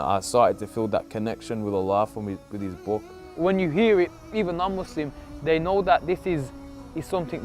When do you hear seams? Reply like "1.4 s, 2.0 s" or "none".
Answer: 3.2 s

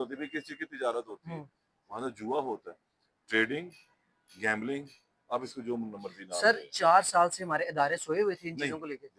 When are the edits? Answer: none

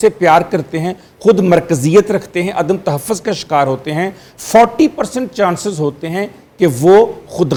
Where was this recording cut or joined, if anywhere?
none

